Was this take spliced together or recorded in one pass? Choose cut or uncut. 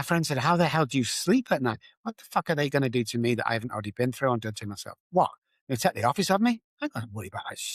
uncut